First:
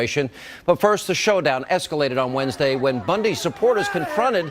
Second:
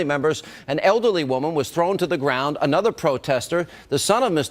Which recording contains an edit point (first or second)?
first